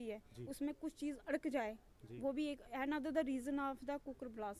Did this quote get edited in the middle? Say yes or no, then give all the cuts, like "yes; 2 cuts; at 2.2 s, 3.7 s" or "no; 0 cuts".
no; 0 cuts